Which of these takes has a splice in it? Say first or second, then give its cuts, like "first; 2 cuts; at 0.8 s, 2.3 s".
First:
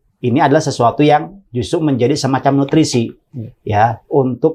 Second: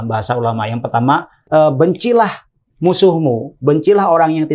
second; 1 cut; at 1.3 s